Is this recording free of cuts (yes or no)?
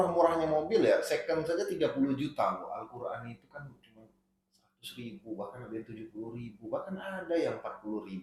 yes